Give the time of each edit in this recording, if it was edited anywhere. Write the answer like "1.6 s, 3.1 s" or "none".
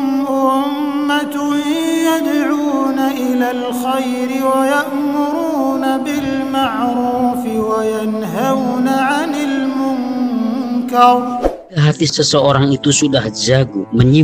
11.8 s